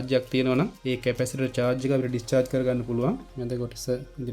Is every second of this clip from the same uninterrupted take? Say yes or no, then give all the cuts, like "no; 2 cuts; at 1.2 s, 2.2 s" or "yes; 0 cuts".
no; 1 cut; at 3.3 s